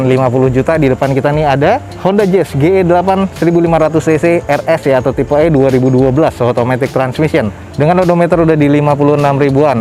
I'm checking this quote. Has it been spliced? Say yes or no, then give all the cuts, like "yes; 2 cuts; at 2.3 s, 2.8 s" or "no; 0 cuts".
no; 0 cuts